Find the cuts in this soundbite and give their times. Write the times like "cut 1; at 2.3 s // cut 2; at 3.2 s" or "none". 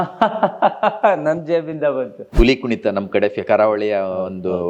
cut 1; at 2.2 s